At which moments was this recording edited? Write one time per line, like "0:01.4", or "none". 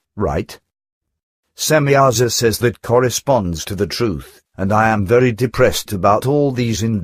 none